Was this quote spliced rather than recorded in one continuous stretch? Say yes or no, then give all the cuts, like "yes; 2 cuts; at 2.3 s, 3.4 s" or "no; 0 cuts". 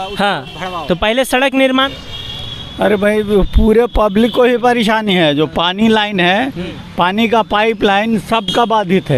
yes; 1 cut; at 1.9 s